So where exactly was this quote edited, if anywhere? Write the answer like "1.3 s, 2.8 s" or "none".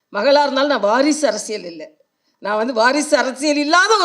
none